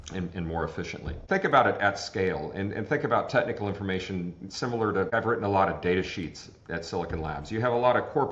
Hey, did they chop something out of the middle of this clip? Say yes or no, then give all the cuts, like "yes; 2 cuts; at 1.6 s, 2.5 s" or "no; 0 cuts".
yes; 2 cuts; at 1.2 s, 5.1 s